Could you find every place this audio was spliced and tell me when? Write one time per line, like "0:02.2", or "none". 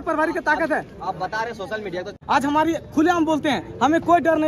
0:02.1